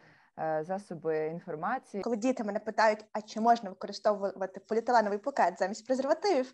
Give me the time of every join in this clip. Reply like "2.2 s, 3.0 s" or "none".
1.9 s